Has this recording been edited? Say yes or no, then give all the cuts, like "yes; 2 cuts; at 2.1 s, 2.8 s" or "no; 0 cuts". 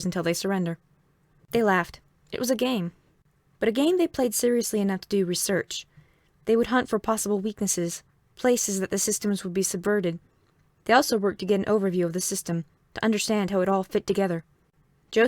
yes; 1 cut; at 6.3 s